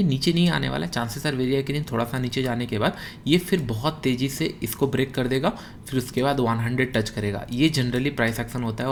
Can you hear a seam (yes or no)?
no